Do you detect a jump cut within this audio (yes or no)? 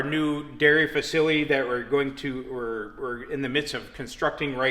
no